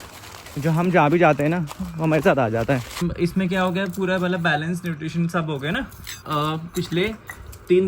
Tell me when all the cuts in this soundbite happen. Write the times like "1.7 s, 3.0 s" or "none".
3.1 s, 6.1 s